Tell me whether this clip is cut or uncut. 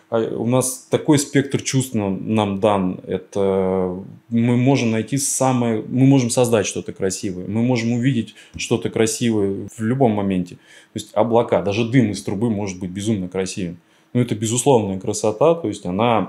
cut